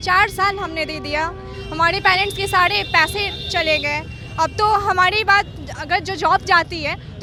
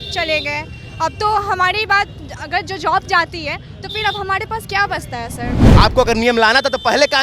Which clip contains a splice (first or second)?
second